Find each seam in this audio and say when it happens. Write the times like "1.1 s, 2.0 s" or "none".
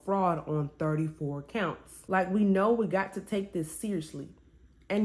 1.9 s